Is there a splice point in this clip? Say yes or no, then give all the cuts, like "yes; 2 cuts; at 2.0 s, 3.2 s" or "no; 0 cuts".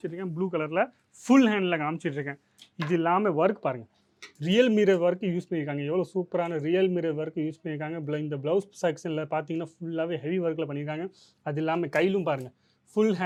no; 0 cuts